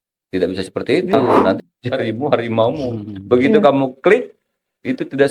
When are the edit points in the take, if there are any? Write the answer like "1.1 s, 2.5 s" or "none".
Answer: 1.6 s